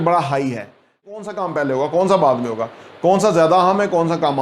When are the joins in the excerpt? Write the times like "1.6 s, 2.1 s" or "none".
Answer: 1.1 s